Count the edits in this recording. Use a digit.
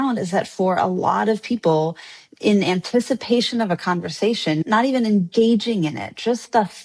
1